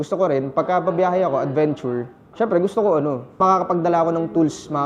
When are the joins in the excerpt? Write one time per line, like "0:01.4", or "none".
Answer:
0:02.2
0:03.2

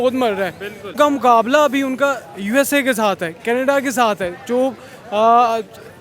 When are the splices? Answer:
0:01.0

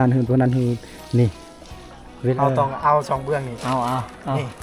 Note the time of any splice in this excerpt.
0:02.2

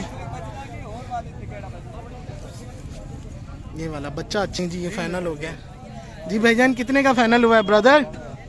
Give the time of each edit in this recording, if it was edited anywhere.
0:04.6

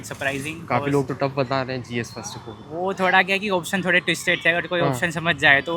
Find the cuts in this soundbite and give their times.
none

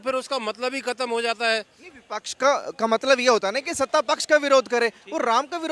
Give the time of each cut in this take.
none

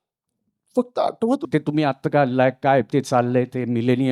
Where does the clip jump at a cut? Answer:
0:01.4

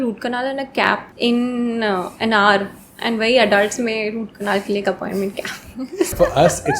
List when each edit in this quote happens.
0:01.1
0:06.1

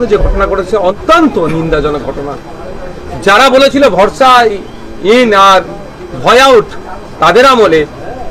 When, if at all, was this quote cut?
0:01.0

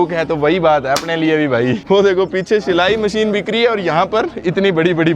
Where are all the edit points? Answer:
0:01.8

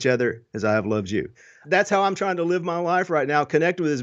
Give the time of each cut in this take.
0:01.6

